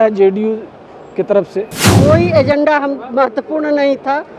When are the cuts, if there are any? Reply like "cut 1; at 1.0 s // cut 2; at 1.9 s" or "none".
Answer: cut 1; at 1.8 s